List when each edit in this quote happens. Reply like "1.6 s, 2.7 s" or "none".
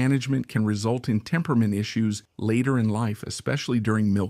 2.3 s